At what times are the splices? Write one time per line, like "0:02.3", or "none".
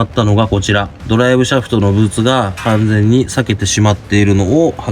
0:01.0

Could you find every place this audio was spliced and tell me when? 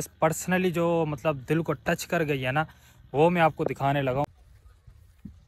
0:04.3

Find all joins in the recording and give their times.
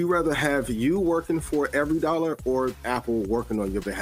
0:02.8

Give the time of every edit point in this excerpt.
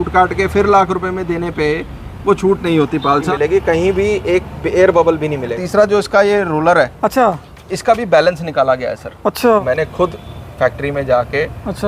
0:03.3
0:05.6
0:09.6

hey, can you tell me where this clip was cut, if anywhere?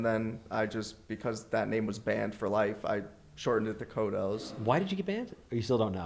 none

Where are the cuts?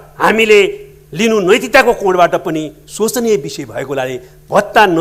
none

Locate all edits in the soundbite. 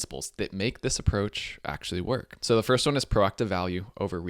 0:02.3

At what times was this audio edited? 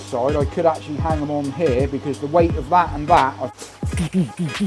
0:03.5

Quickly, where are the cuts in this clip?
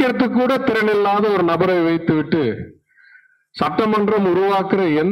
none

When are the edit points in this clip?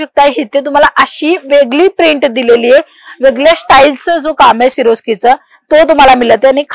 none

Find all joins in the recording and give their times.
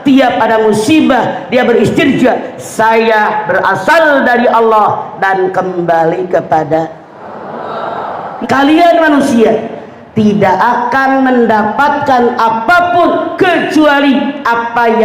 0:08.3

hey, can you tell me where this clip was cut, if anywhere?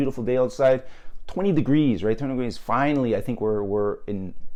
none

